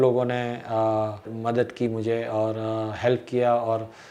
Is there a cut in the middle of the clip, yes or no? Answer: yes